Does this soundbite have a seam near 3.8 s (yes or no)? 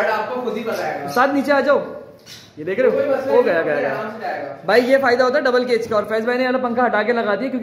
no